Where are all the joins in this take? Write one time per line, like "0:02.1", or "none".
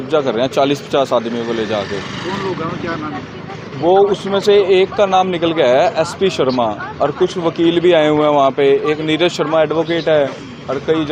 none